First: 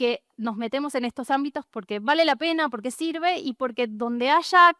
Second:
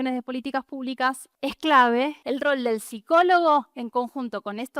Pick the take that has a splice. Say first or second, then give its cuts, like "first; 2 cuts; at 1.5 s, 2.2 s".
second; 2 cuts; at 1.3 s, 2.2 s